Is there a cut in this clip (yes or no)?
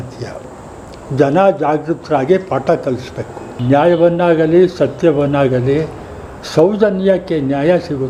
no